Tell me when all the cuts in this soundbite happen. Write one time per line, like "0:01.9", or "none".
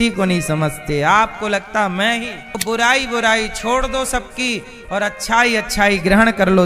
0:02.6